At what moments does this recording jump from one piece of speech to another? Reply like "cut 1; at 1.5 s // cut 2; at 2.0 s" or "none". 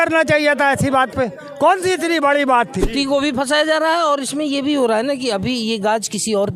cut 1; at 2.8 s